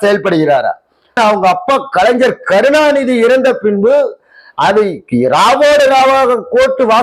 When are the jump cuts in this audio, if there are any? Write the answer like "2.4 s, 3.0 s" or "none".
1.2 s